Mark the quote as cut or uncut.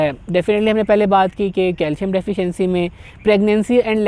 uncut